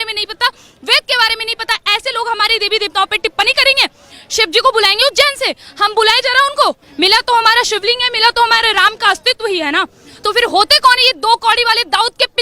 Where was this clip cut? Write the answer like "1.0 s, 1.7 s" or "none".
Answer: 6.9 s